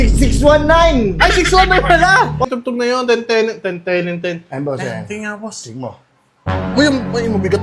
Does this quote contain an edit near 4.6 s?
no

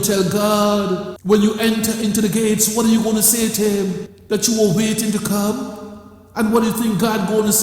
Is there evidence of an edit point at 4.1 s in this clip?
yes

